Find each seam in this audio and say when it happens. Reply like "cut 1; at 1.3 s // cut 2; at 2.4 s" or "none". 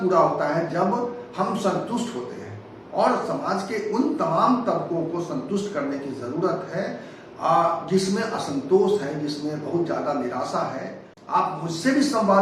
cut 1; at 11.1 s